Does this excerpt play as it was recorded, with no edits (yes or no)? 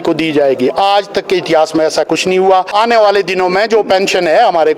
no